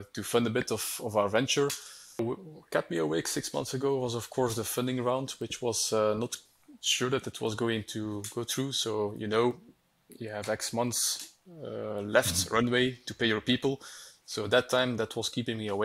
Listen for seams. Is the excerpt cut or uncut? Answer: cut